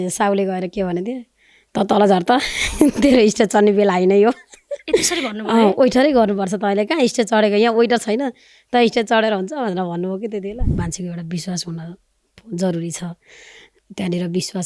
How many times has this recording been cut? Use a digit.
1